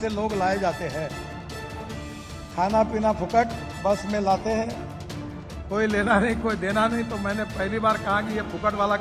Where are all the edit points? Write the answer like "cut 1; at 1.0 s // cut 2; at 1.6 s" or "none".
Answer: none